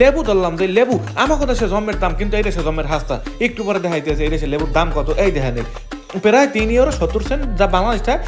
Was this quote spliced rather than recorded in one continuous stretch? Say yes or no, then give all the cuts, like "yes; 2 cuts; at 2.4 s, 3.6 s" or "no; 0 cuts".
no; 0 cuts